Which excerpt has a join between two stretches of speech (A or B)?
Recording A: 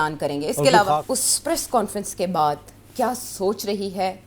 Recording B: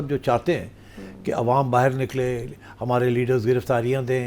A